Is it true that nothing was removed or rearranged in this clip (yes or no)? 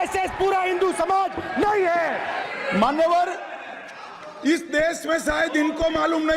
no